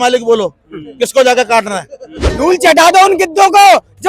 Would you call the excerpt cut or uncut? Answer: cut